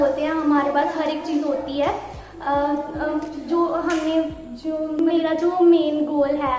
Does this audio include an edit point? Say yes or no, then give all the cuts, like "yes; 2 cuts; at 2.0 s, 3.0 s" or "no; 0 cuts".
yes; 1 cut; at 5.0 s